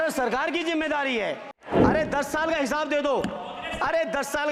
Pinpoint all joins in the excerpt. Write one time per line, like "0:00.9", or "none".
0:01.6